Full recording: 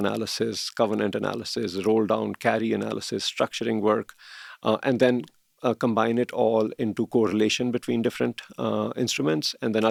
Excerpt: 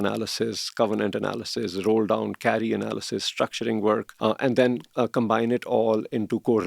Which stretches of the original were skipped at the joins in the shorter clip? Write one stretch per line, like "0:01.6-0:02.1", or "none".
0:04.1-0:04.5
0:05.3-0:05.5